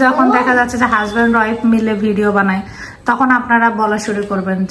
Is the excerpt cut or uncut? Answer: uncut